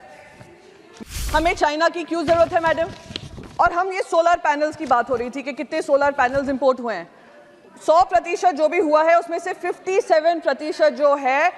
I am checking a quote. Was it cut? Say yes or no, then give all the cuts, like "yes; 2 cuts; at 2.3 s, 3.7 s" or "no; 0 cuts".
yes; 1 cut; at 1.2 s